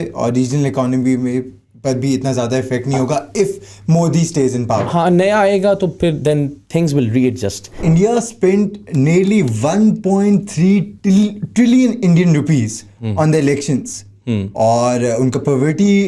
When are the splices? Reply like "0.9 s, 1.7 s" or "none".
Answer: 7.8 s